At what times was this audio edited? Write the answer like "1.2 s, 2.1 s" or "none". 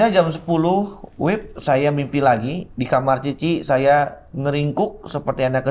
none